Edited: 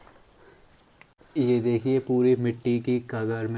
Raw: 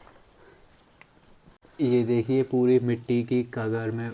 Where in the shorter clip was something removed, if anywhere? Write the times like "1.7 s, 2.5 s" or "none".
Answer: 1.1 s